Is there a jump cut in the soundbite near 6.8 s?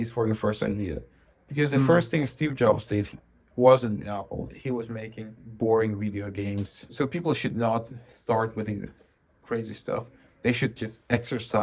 yes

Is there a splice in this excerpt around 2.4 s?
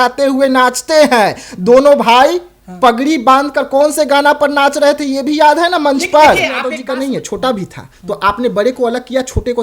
no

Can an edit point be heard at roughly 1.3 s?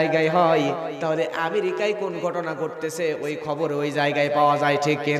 no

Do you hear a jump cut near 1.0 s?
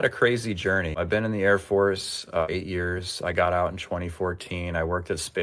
yes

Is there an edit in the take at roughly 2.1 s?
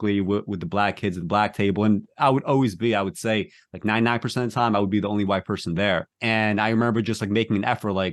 no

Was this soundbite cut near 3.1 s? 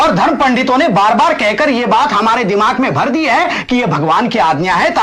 no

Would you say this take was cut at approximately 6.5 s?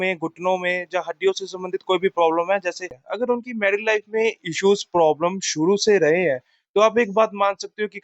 no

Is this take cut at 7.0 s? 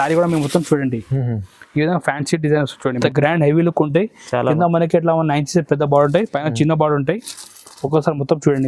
no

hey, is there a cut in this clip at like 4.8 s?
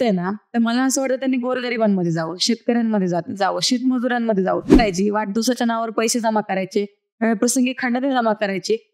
yes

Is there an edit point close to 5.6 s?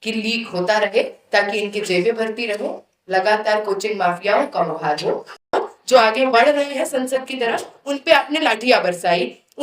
yes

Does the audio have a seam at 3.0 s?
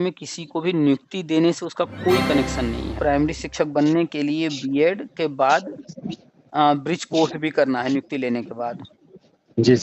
yes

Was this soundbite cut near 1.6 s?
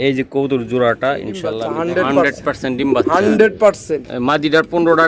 yes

